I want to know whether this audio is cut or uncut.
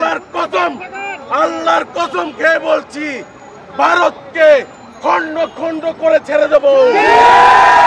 uncut